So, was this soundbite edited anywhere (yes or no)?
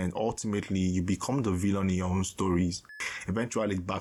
yes